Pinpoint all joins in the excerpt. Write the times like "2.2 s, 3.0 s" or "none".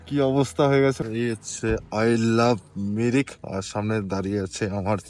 1.0 s